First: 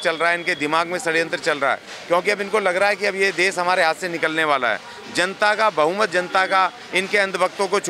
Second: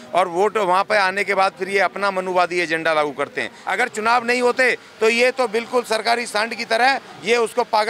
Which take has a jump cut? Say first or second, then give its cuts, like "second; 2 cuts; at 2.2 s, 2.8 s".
second; 1 cut; at 3.6 s